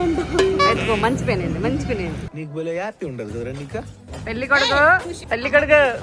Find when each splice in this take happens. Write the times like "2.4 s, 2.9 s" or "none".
4.0 s, 5.1 s